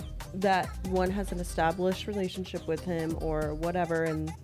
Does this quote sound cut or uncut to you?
uncut